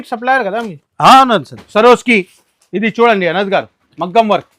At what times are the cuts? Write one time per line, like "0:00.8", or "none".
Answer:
0:01.6